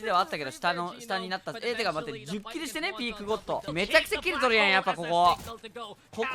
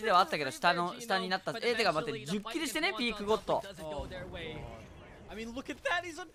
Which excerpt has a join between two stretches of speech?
first; 1 cut; at 3.7 s

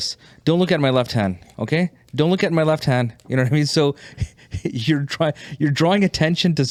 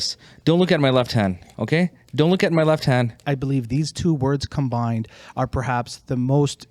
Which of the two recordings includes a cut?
second; 1 cut; at 3.2 s

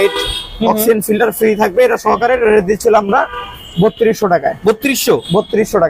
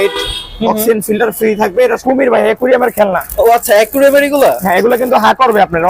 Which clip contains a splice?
second; 1 cut; at 2.0 s

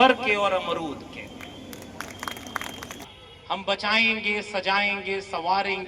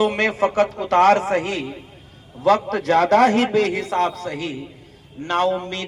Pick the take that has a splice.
first; 1 cut; at 2.9 s

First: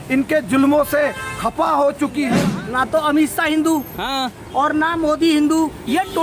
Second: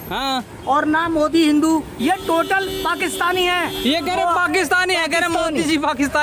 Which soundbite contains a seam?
first; 1 cut; at 2.4 s

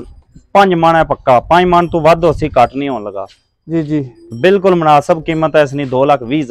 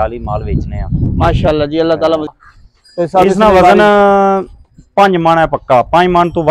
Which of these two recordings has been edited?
second; 1 cut; at 2.3 s

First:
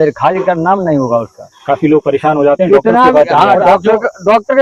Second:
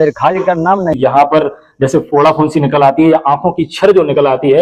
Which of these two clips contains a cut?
second; 1 cut; at 0.9 s

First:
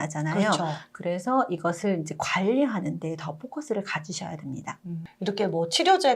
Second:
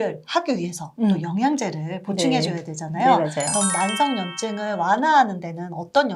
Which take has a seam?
first; 1 cut; at 5.0 s

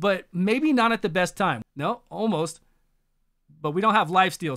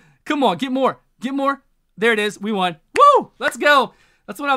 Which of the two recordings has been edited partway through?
first; 1 cut; at 1.6 s

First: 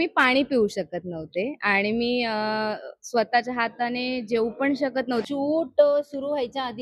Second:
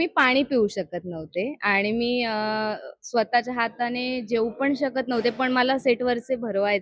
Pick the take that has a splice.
first; 1 cut; at 5.2 s

